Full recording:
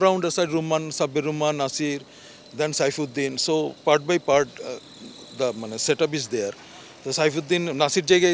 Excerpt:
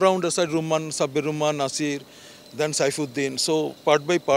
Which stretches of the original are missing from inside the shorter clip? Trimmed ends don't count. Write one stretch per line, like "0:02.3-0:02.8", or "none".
none